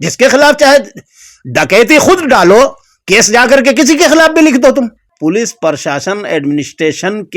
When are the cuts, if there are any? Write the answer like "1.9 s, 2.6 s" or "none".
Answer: 5.0 s